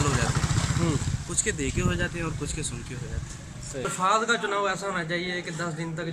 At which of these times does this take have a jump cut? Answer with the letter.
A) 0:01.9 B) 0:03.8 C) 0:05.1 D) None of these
B